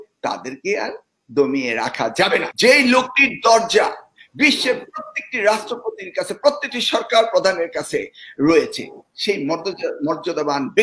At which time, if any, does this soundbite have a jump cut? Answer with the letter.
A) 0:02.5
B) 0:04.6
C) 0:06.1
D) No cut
A